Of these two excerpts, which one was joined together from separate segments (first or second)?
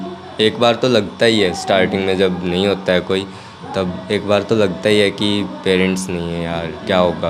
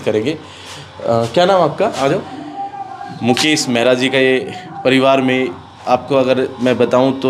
second